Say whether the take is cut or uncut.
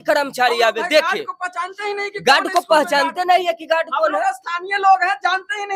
uncut